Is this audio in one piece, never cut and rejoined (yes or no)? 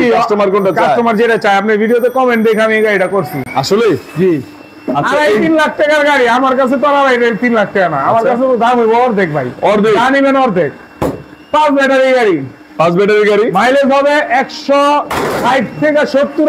yes